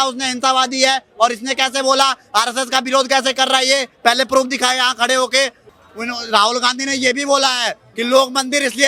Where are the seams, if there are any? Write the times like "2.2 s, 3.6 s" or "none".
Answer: 5.7 s